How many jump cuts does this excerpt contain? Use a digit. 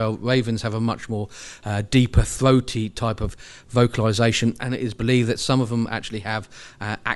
1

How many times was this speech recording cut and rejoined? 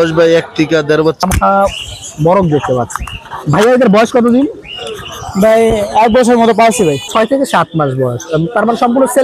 2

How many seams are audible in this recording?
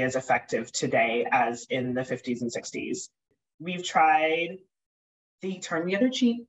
1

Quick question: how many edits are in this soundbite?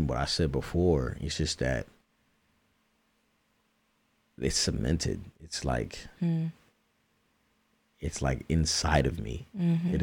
0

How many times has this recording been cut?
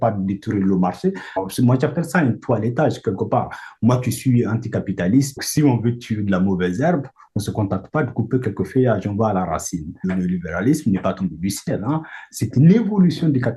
3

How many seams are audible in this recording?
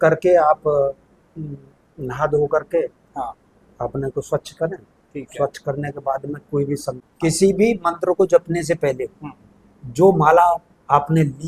1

